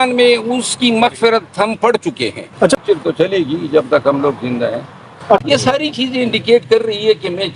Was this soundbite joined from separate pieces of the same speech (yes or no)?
yes